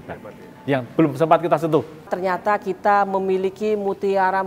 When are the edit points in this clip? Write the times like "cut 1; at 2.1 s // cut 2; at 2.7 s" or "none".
cut 1; at 2.1 s